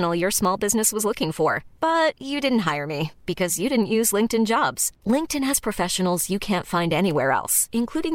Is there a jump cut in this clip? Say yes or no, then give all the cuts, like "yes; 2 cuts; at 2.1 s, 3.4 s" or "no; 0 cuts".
no; 0 cuts